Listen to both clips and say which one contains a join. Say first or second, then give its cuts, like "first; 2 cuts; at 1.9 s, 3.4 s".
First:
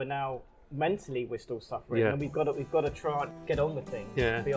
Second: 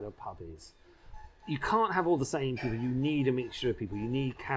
first; 1 cut; at 3.3 s